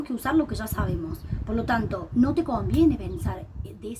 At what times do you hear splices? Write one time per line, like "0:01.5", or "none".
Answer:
none